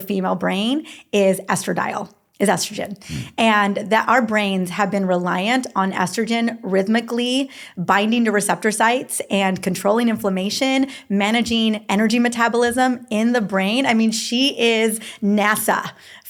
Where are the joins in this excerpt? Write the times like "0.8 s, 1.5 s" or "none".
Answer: none